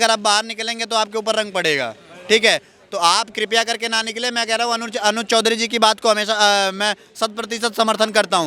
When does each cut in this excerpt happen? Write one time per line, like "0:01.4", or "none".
none